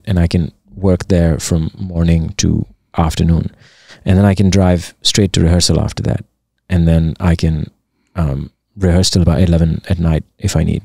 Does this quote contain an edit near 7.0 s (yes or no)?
no